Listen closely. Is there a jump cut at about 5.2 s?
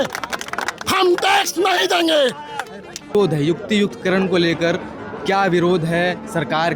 no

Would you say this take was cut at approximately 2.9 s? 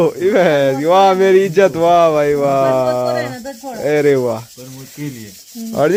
no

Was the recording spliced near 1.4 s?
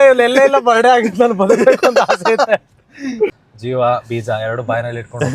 no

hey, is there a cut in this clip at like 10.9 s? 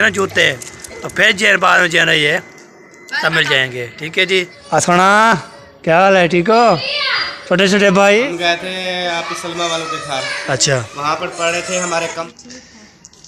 no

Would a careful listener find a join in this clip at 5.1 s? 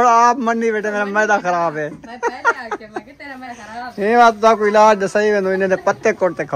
no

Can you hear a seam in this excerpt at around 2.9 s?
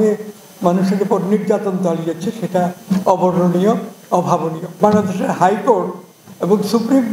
no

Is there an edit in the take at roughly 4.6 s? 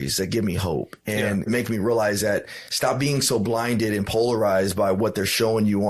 no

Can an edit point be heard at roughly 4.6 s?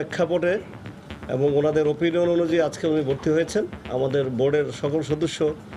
no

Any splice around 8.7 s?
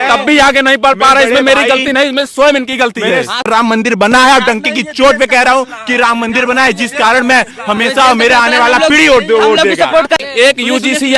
no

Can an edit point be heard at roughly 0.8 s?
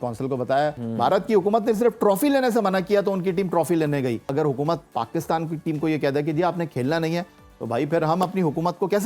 yes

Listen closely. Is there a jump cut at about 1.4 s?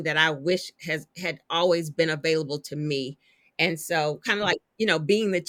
no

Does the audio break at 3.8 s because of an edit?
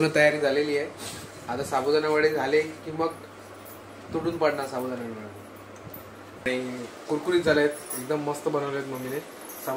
no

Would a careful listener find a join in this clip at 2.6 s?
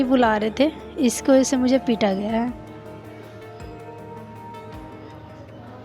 no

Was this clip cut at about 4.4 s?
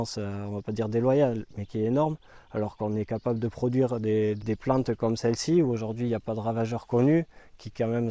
yes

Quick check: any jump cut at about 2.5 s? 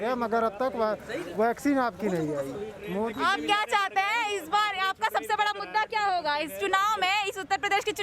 no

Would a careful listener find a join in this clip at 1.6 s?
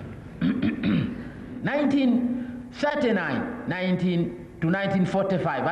yes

